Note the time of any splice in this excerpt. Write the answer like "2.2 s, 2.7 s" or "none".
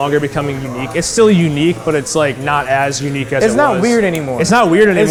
none

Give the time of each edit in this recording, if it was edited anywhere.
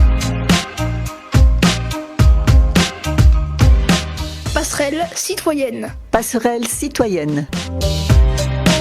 7.6 s

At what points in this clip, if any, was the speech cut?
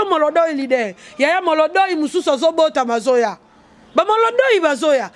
none

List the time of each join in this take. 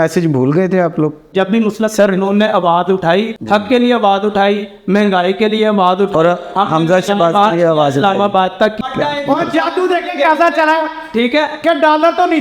1.3 s, 3.4 s, 8.8 s

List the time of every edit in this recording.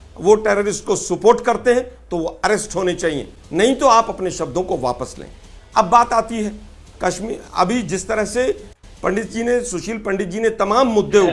none

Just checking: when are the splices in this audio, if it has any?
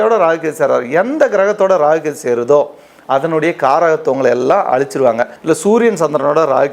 5.3 s

